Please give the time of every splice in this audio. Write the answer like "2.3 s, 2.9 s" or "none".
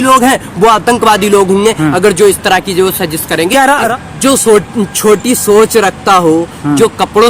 3.9 s